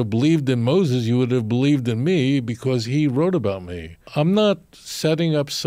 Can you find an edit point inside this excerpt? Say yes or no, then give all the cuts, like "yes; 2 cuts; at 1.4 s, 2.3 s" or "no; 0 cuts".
yes; 1 cut; at 4.1 s